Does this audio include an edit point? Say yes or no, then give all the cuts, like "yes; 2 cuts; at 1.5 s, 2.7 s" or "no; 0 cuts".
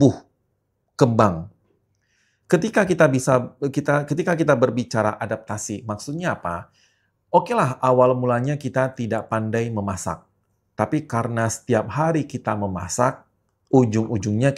no; 0 cuts